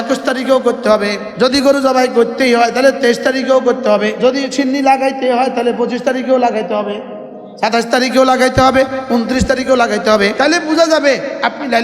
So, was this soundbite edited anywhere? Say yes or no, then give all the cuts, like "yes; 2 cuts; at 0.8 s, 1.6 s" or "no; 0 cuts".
yes; 3 cuts; at 1.2 s, 4.1 s, 10.3 s